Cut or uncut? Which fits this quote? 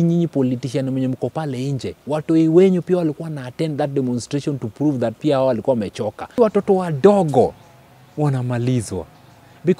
cut